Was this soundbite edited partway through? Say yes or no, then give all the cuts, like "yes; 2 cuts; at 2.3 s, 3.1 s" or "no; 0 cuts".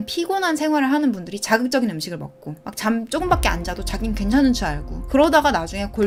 no; 0 cuts